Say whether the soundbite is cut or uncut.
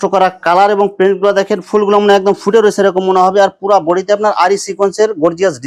uncut